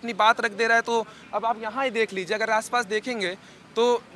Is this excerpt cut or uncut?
uncut